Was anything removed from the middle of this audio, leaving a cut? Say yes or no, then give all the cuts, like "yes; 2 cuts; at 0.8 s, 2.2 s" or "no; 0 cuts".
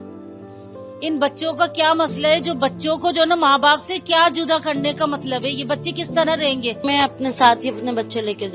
yes; 1 cut; at 6.8 s